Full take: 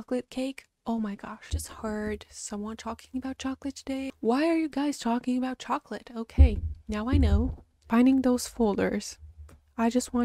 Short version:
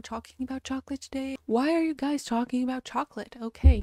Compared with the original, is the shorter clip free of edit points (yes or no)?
yes